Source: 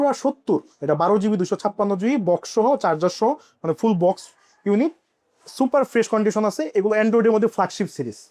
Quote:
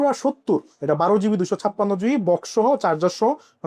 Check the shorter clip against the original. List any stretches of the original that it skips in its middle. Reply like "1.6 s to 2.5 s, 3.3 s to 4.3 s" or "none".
none